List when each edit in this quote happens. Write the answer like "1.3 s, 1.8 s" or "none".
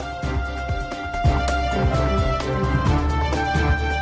1.1 s